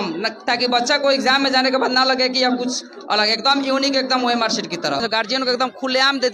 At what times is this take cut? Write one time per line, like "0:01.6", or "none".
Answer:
0:05.0